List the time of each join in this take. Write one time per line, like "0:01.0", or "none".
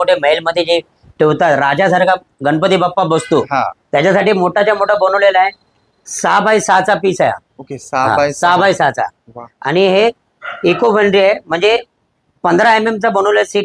none